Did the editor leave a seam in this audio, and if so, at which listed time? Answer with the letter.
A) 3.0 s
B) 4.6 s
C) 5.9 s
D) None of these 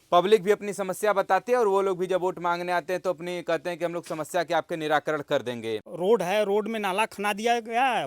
C